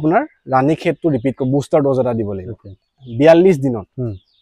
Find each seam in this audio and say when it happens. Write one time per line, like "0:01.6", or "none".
0:02.8